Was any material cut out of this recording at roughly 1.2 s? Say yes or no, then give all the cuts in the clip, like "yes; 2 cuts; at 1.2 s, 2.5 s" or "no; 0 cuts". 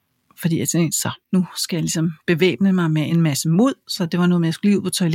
yes; 2 cuts; at 1.2 s, 3.1 s